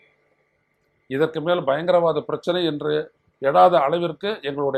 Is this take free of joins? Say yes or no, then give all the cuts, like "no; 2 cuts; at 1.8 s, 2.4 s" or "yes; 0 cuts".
yes; 0 cuts